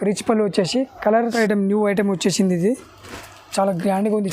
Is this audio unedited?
no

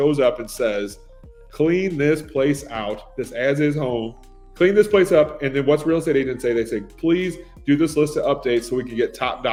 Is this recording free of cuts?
yes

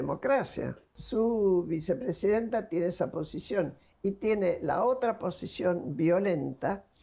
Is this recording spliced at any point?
yes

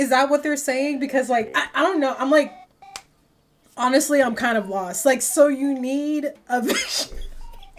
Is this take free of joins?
yes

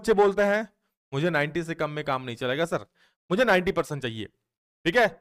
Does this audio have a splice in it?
no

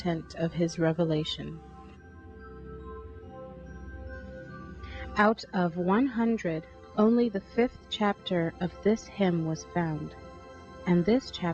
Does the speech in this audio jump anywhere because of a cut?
yes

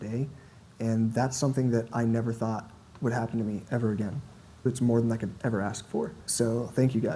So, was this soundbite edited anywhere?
yes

